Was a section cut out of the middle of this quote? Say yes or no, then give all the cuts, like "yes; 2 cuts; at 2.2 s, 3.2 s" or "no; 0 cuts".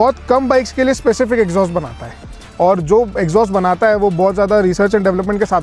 no; 0 cuts